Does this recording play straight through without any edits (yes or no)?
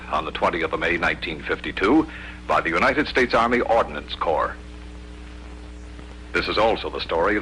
no